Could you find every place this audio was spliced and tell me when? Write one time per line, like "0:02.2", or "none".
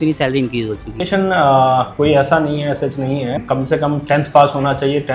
0:01.1
0:03.4